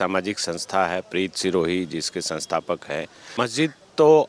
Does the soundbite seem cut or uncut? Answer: cut